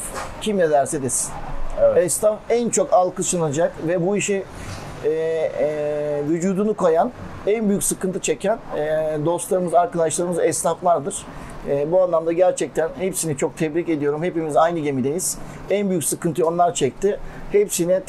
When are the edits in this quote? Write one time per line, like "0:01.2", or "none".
none